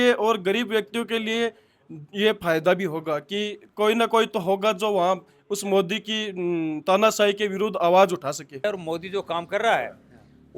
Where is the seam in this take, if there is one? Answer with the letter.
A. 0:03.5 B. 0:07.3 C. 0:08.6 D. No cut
C